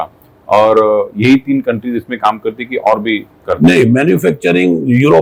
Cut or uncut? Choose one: uncut